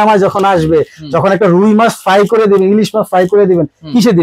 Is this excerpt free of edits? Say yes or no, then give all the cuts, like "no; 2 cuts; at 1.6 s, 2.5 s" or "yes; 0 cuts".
yes; 0 cuts